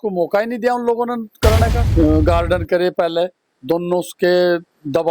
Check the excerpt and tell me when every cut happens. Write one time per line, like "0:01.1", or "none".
0:01.7